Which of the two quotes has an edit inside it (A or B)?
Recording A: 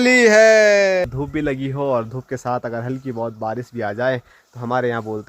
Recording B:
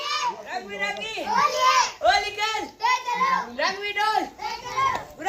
A